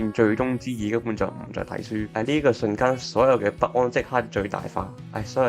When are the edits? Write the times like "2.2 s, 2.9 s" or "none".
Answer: 2.1 s